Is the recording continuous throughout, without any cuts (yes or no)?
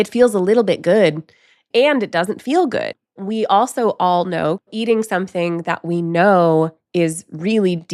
no